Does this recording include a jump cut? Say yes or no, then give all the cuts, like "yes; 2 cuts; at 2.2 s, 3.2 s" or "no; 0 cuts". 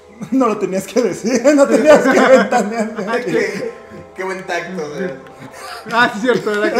no; 0 cuts